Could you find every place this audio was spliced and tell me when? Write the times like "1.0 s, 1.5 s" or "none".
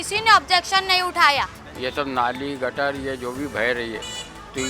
1.6 s